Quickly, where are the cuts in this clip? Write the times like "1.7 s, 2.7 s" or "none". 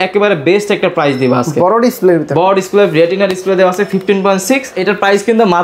4.7 s